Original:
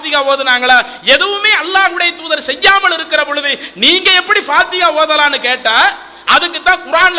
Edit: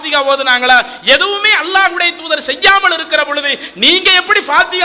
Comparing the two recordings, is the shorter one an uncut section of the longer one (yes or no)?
yes